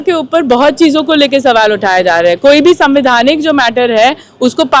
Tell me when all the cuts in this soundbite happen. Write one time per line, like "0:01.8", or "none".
none